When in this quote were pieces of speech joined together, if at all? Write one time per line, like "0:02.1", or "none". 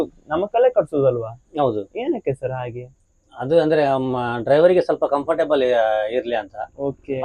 none